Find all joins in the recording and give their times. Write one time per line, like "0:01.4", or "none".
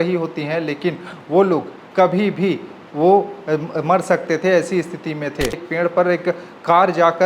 0:05.6